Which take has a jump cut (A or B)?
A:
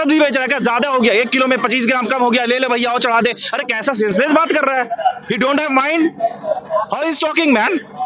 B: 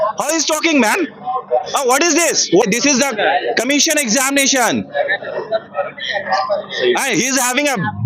B